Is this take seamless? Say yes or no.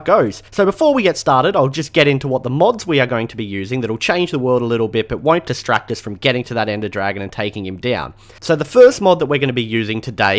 no